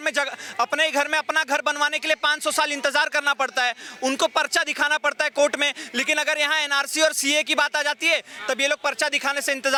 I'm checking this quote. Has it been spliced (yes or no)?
no